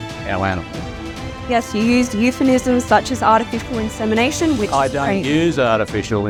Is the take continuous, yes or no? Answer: yes